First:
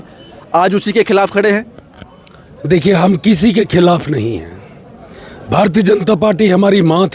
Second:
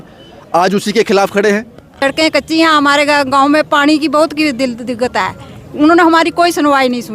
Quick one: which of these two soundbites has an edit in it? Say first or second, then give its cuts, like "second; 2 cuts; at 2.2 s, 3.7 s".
second; 1 cut; at 1.9 s